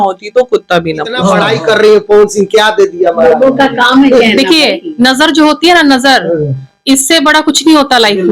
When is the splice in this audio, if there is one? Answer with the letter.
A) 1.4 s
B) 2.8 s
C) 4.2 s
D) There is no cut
A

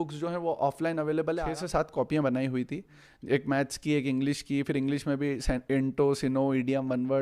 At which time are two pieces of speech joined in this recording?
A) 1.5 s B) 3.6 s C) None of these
A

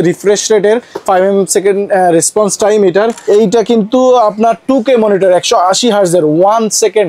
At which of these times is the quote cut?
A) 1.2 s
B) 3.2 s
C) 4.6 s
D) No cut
B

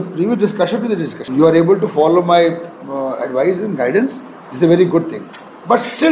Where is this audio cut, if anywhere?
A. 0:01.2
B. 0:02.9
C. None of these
A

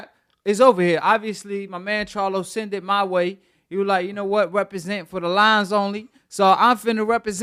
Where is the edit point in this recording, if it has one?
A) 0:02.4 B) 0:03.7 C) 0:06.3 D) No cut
D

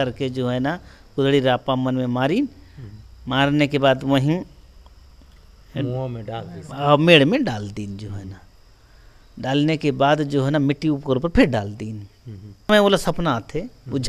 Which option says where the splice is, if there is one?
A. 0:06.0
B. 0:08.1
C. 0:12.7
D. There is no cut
C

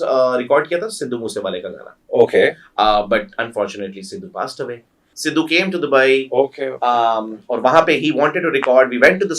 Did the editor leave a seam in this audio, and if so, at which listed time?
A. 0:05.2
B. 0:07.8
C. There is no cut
A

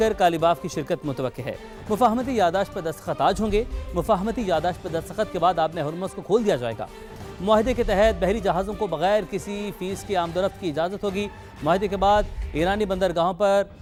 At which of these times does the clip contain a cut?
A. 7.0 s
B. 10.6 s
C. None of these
C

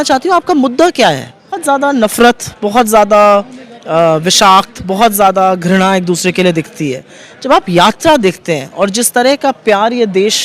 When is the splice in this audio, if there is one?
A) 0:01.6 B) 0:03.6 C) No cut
A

